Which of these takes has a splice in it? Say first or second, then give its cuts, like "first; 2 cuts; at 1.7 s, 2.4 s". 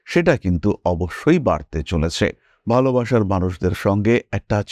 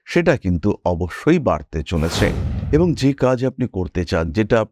second; 1 cut; at 2.5 s